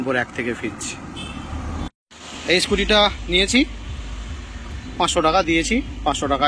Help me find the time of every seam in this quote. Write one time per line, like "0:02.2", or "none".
0:01.9